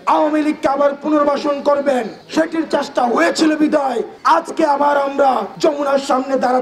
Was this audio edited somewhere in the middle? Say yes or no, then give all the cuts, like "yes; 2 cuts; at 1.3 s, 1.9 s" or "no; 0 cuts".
no; 0 cuts